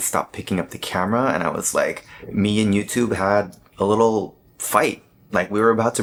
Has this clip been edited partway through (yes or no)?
no